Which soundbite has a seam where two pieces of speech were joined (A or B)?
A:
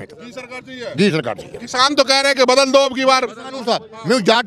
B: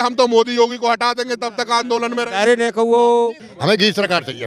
B